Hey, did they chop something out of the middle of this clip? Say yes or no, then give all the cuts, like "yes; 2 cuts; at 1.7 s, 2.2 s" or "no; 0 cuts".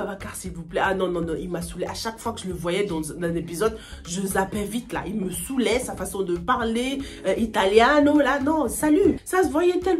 no; 0 cuts